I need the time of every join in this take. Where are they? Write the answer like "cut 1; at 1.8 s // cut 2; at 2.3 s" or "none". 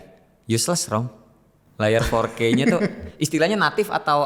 none